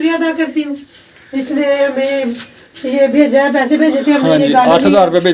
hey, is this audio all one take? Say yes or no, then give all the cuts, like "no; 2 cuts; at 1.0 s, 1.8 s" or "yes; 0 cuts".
yes; 0 cuts